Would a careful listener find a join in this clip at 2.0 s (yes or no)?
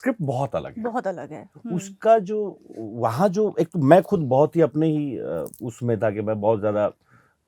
no